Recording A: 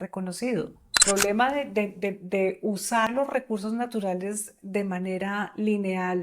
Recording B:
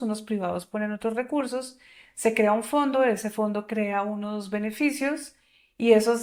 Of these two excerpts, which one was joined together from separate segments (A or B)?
A